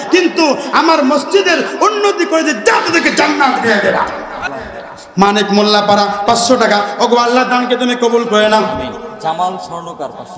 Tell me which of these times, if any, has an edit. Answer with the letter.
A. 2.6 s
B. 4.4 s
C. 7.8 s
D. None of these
B